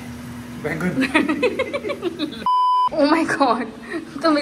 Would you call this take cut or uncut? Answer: cut